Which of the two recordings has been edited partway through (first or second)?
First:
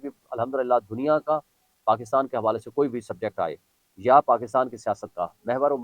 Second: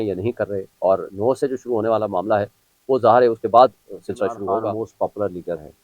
second